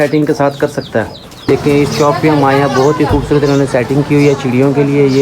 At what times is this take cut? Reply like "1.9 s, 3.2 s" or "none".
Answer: 1.3 s